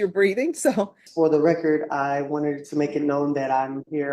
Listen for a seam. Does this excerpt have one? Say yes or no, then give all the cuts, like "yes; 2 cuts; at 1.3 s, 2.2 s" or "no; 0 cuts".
yes; 1 cut; at 1.0 s